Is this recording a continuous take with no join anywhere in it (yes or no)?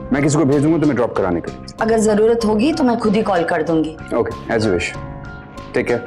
no